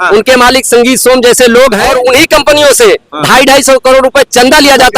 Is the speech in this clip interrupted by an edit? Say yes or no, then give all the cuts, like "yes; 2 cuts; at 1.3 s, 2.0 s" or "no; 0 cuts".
yes; 1 cut; at 1.8 s